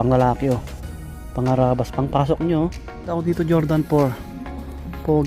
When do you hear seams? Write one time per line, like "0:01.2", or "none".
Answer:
0:03.1